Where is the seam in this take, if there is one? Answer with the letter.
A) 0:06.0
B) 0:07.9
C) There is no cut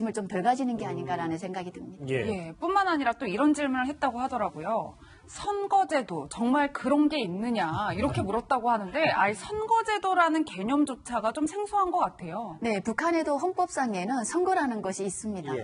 A